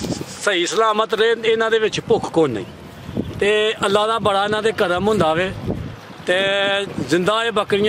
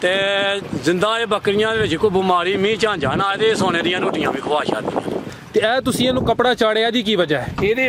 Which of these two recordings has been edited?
second; 1 cut; at 5.2 s

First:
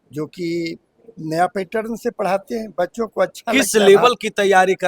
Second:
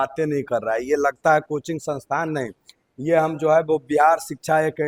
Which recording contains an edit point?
first; 1 cut; at 3.5 s

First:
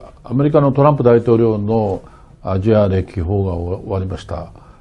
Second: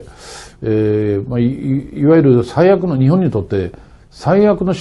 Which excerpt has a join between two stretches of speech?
second; 1 cut; at 1.3 s

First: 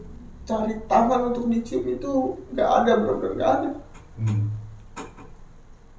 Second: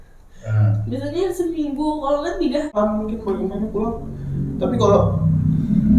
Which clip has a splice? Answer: second; 1 cut; at 2.7 s

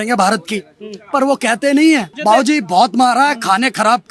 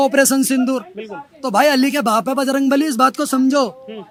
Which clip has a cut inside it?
first; 1 cut; at 2.1 s

